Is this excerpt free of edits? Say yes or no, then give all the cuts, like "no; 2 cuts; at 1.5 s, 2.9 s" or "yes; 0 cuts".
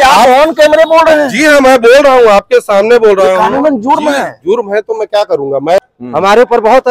no; 1 cut; at 5.8 s